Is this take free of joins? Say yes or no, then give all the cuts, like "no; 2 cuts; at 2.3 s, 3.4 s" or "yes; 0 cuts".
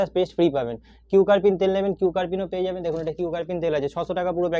yes; 0 cuts